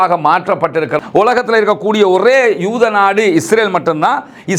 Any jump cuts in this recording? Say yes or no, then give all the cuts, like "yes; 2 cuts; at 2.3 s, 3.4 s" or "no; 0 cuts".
yes; 1 cut; at 1.0 s